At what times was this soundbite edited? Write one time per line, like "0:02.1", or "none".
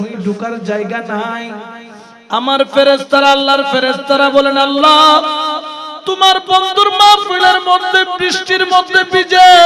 none